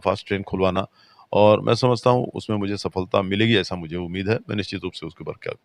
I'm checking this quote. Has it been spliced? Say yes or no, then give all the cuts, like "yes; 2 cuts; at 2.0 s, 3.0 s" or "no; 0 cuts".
no; 0 cuts